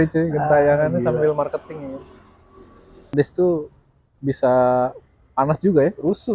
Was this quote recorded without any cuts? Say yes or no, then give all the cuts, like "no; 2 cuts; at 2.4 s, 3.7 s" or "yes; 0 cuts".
no; 1 cut; at 3.1 s